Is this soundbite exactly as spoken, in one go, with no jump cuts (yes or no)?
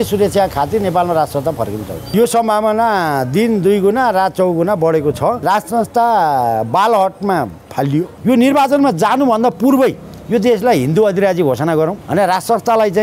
no